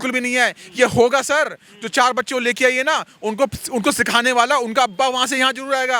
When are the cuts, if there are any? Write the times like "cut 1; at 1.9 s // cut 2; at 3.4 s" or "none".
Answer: none